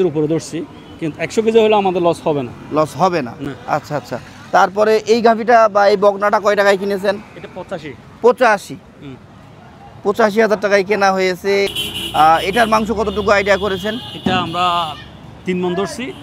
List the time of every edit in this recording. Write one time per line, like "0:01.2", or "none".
none